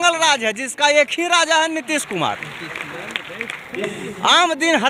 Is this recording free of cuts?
yes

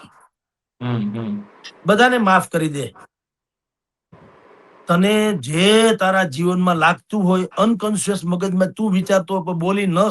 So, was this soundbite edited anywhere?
no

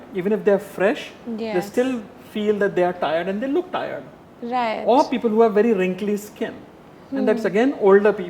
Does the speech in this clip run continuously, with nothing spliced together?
yes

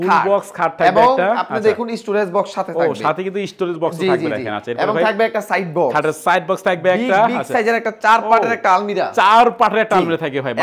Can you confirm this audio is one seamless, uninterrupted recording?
yes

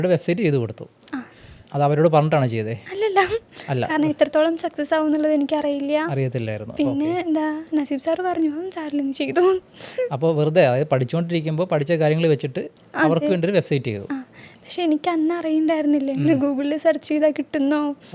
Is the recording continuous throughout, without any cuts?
yes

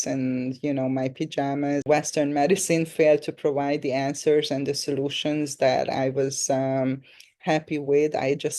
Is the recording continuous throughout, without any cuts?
no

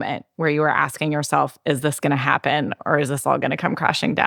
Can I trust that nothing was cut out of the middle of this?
yes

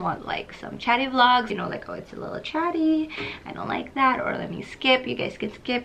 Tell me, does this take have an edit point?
yes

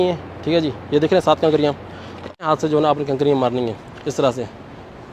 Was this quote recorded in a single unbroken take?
no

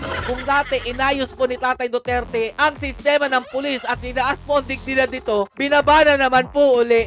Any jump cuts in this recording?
no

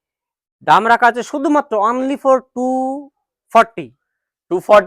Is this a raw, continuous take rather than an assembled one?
yes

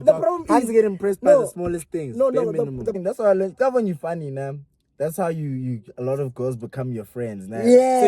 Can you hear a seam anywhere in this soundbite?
yes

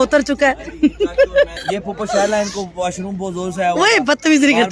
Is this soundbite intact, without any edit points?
no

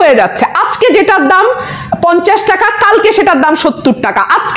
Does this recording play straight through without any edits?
yes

